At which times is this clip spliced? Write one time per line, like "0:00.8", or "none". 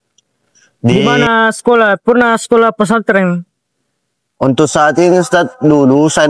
0:00.9